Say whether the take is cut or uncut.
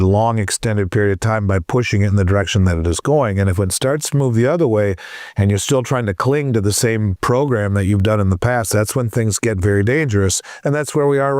cut